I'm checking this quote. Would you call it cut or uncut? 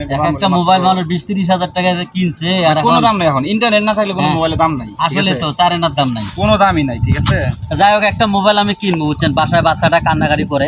uncut